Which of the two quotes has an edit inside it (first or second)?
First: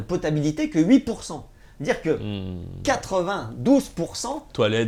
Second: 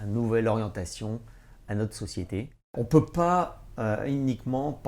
second